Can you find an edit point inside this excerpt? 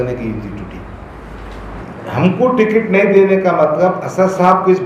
yes; 1 cut; at 1.8 s

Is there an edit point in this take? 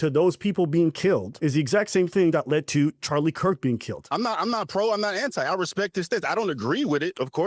yes; 2 cuts; at 1.3 s, 4.0 s

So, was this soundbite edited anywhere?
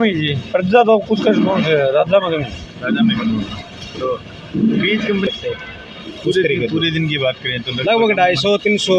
yes; 1 cut; at 5.3 s

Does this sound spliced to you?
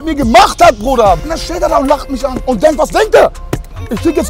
yes; 1 cut; at 1.2 s

